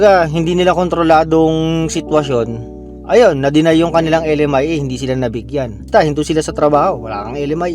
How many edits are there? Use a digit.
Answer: 1